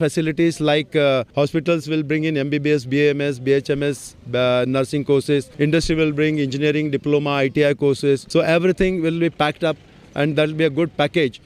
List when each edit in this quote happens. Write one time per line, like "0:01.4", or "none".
0:01.3
0:05.5
0:08.2